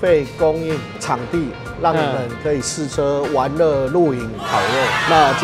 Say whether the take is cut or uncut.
uncut